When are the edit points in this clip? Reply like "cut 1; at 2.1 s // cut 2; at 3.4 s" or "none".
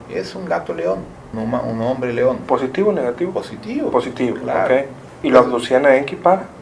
cut 1; at 1.3 s // cut 2; at 5.1 s